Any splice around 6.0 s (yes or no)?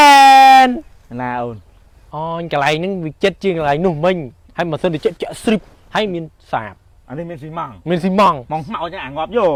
no